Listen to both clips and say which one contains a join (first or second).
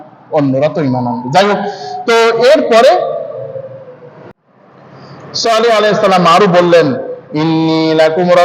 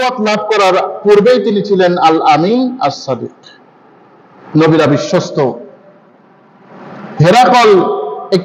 first